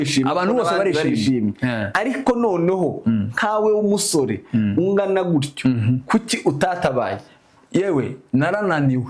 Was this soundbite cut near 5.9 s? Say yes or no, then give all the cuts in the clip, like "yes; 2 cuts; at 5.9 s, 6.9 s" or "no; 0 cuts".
no; 0 cuts